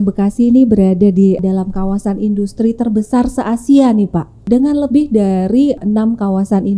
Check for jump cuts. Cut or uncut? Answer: cut